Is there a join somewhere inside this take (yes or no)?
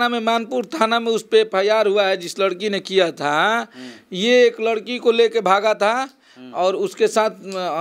no